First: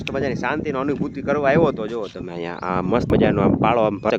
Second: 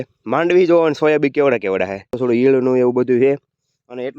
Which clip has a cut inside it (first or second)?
second